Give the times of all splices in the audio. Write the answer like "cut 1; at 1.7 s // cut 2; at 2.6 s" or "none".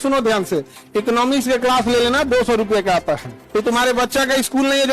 cut 1; at 3.3 s